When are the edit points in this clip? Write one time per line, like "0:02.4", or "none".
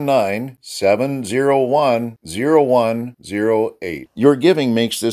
none